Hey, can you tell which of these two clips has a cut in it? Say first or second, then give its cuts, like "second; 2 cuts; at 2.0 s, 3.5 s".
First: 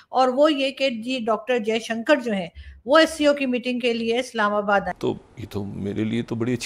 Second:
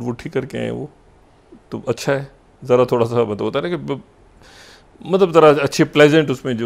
first; 1 cut; at 4.9 s